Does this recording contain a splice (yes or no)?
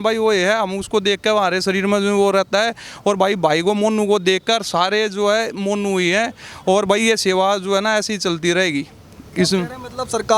no